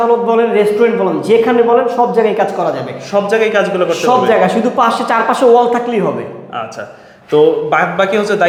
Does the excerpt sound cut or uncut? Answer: uncut